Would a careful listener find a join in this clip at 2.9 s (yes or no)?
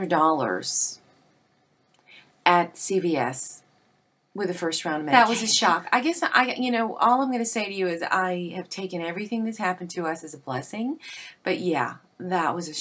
no